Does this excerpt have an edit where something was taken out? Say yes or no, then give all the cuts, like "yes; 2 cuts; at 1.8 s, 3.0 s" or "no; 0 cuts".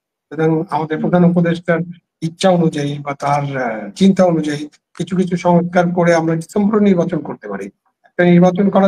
no; 0 cuts